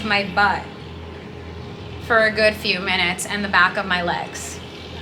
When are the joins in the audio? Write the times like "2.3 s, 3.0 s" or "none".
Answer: none